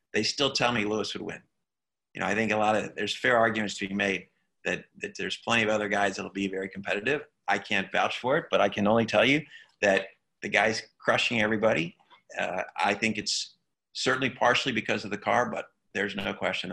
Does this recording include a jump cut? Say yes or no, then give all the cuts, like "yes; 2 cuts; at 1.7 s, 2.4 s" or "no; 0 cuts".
no; 0 cuts